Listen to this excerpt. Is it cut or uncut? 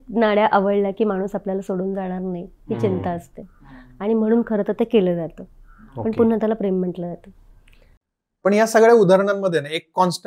uncut